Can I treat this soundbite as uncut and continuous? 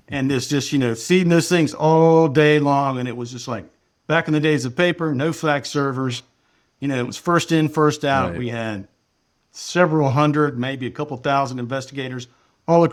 yes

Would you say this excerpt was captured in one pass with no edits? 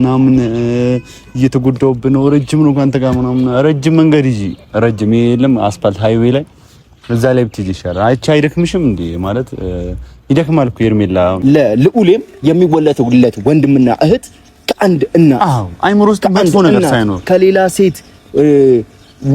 no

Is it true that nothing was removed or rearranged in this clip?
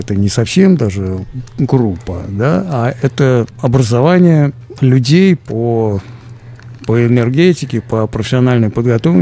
no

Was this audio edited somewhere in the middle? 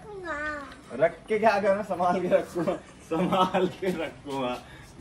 no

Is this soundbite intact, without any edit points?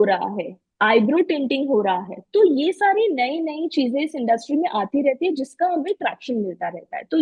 yes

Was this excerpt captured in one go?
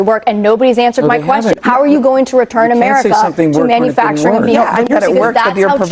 no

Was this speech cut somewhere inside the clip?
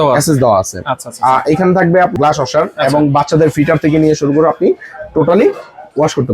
yes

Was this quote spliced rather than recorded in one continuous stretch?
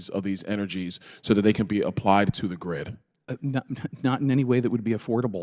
no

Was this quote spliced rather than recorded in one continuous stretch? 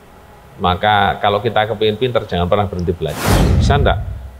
yes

